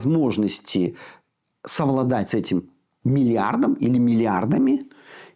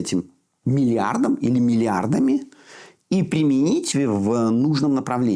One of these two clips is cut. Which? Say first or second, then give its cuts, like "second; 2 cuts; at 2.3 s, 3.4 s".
second; 1 cut; at 3.9 s